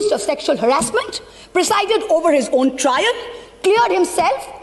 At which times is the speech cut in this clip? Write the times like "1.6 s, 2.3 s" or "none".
none